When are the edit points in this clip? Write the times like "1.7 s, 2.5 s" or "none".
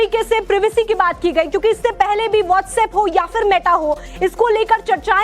2.9 s

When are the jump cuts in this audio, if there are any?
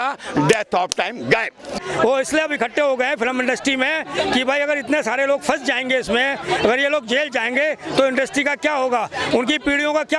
1.8 s

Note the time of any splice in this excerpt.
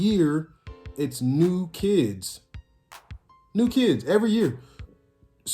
none

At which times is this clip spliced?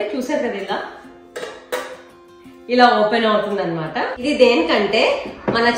4.2 s

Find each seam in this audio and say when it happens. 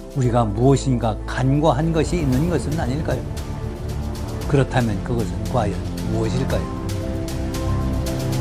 none

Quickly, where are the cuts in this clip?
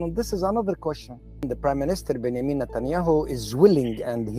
1.4 s

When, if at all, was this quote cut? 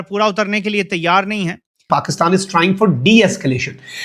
1.8 s

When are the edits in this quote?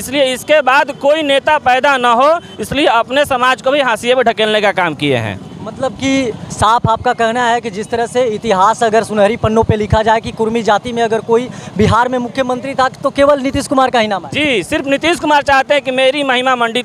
none

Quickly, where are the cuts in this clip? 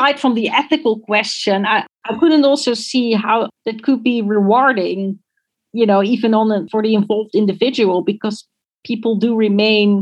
1.9 s, 3.5 s

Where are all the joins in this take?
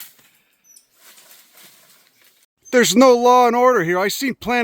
2.5 s

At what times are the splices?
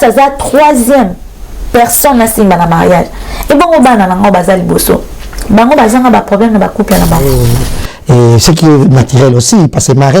7.3 s

